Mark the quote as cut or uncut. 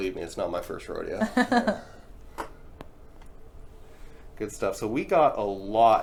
uncut